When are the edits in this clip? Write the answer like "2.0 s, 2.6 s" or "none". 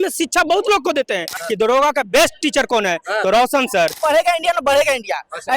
1.3 s, 4.0 s